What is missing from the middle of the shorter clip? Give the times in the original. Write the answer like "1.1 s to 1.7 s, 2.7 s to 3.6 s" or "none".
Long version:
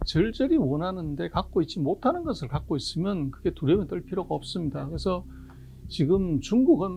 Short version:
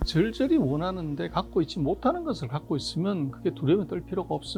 none